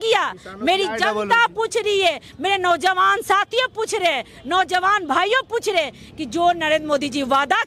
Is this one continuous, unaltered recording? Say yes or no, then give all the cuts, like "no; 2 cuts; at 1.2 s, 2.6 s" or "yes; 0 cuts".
yes; 0 cuts